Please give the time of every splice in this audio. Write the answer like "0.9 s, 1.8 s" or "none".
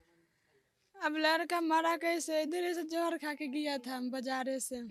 none